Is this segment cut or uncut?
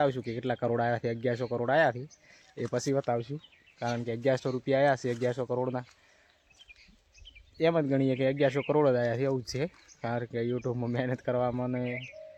uncut